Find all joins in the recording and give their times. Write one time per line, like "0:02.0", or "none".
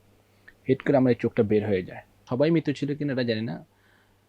0:02.3